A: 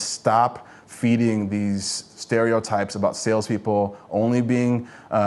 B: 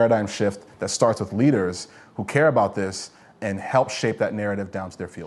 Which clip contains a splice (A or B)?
A